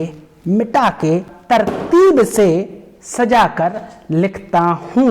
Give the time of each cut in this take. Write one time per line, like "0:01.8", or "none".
0:01.3